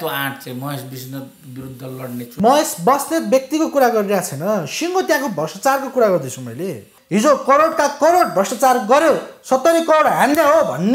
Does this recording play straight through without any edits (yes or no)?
no